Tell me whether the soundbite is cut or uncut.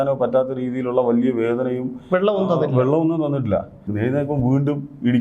cut